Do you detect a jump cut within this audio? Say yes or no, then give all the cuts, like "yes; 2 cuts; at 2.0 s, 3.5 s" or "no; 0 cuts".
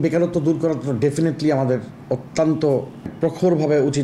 yes; 1 cut; at 3.1 s